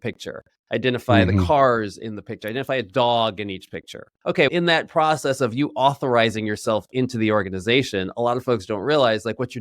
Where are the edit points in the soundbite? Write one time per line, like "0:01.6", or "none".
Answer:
0:04.0